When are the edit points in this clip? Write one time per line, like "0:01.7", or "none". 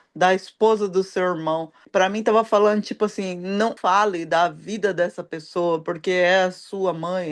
0:01.7
0:03.7